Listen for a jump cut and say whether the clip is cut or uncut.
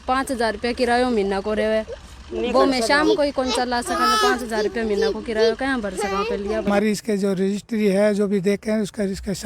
cut